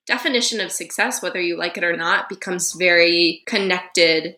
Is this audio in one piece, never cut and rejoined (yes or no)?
yes